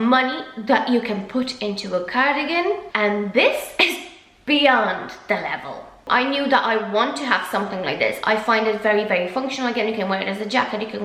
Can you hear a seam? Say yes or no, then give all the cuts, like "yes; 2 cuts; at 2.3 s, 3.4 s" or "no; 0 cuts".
no; 0 cuts